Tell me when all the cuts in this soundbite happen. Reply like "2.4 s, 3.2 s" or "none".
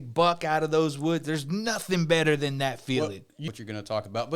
3.4 s

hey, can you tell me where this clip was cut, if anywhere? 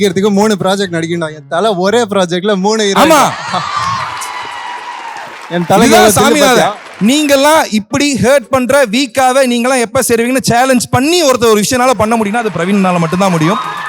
6.8 s

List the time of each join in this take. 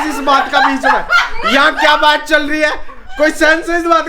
none

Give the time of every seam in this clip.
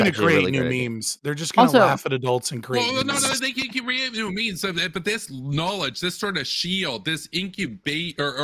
none

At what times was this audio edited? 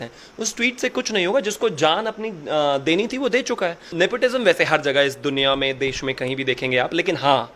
3.9 s

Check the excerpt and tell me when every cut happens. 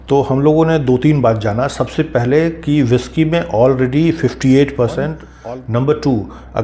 5.3 s

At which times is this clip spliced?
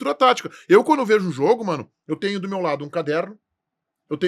none

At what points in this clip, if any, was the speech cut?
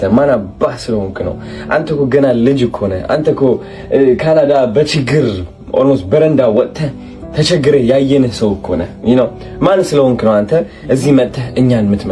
none

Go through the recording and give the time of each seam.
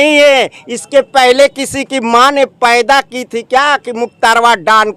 none

